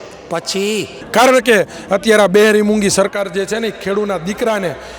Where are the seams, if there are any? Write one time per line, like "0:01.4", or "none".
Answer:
0:01.0